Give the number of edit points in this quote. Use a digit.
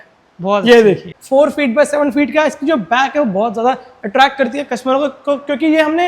1